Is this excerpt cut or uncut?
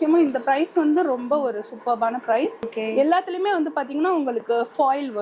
cut